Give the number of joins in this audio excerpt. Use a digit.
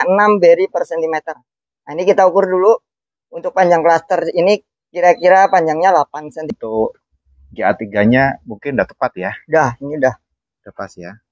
1